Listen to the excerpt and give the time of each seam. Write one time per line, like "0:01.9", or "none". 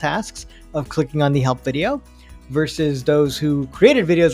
none

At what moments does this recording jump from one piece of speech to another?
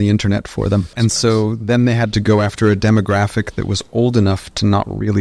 0:00.9
0:02.2

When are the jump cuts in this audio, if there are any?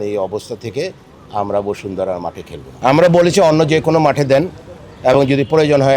0:02.6

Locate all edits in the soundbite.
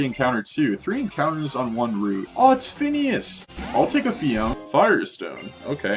0:02.3
0:03.4
0:04.6

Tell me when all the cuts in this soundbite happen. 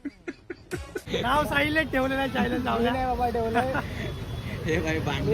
0:01.1

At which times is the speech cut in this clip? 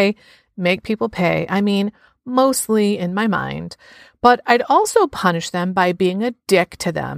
none

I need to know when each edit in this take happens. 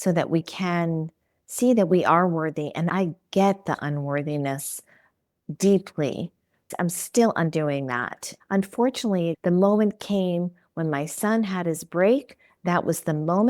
0:02.9
0:08.3

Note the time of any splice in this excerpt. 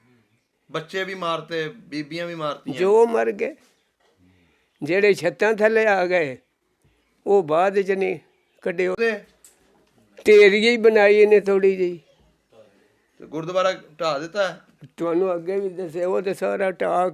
0:09.0

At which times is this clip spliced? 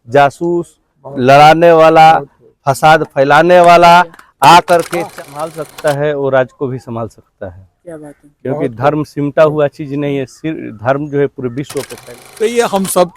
0:05.0
0:11.9

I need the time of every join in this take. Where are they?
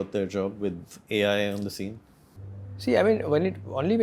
none

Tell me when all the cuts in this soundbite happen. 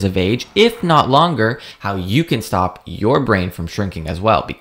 0:01.7

